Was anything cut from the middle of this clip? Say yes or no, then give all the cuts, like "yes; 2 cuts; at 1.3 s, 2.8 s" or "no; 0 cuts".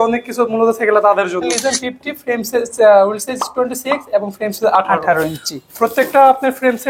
yes; 1 cut; at 1.5 s